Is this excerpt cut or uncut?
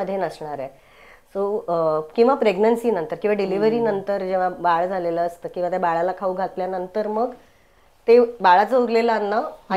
uncut